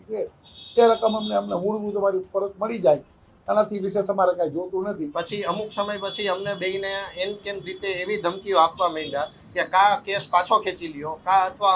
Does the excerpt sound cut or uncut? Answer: cut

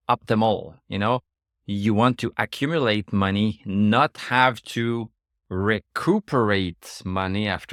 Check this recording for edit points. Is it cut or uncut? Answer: uncut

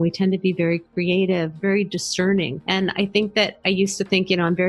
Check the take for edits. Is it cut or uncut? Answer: cut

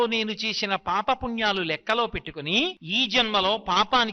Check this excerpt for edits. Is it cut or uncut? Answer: cut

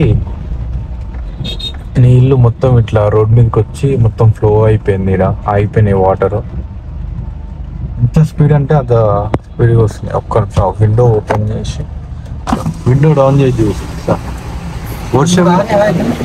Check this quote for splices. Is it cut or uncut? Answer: uncut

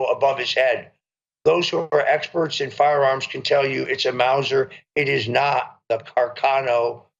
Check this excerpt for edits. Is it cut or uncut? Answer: uncut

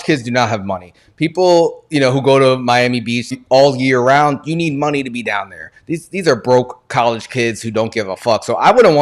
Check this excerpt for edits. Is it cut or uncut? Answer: cut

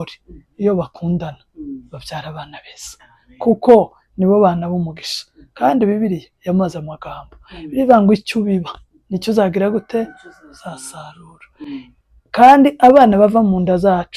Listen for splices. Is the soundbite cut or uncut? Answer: uncut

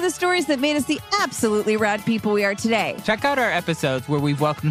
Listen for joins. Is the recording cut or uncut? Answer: cut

